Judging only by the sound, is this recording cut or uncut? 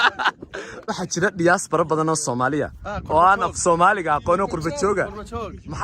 cut